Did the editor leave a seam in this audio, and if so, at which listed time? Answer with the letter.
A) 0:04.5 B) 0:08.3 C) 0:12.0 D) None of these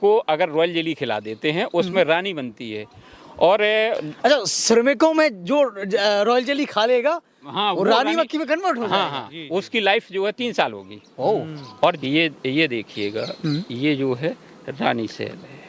C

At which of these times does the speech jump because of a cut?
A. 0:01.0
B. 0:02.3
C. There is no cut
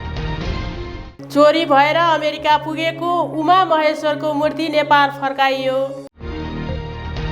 A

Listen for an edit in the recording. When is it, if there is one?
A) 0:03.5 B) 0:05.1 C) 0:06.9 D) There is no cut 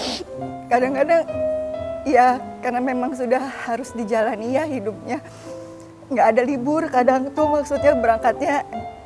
D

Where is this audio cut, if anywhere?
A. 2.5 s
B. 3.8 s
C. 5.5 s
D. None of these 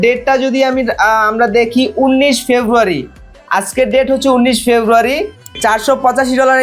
C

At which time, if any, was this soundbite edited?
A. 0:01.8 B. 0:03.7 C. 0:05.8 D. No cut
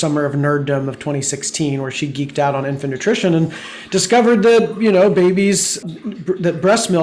C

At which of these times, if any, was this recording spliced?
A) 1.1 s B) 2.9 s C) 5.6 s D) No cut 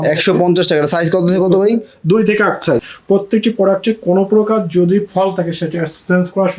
B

